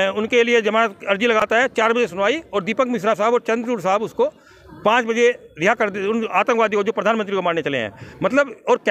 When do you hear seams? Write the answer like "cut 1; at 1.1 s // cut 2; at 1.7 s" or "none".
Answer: none